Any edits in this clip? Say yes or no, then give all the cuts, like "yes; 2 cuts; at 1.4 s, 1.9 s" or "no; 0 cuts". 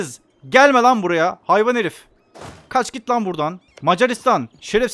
yes; 1 cut; at 3.7 s